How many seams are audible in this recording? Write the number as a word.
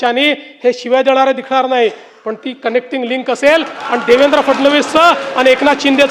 zero